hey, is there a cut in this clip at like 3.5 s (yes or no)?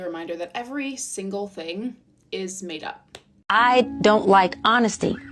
yes